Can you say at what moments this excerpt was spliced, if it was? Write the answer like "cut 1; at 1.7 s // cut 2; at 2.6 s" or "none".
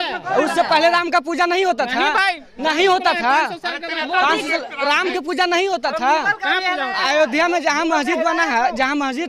none

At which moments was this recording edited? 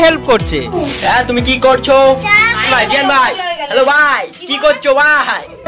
none

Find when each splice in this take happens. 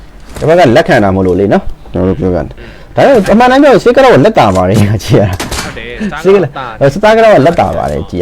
none

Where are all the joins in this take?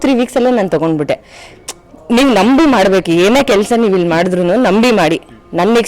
none

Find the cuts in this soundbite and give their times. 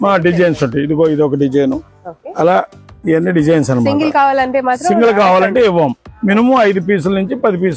none

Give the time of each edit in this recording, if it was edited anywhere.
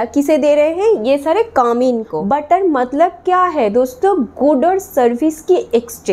cut 1; at 2.1 s

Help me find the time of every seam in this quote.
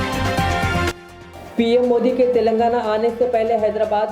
cut 1; at 0.9 s

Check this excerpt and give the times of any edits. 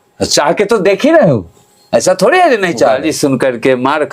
cut 1; at 3.0 s

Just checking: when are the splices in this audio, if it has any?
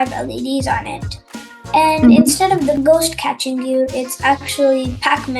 cut 1; at 2.8 s

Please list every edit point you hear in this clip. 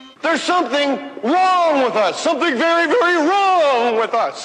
cut 1; at 2.4 s

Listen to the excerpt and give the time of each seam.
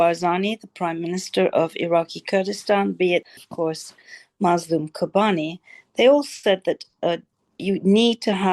cut 1; at 3.3 s

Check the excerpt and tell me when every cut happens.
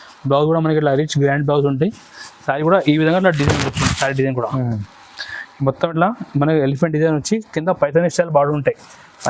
none

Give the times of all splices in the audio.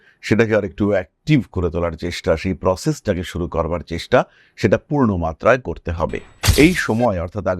cut 1; at 6.3 s

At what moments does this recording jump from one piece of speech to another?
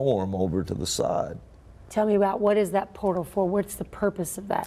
none

